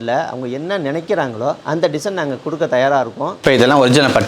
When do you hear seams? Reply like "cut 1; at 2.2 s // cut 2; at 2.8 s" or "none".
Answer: cut 1; at 3.3 s